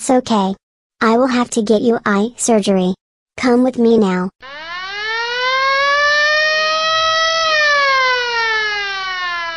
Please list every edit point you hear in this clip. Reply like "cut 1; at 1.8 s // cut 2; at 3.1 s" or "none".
none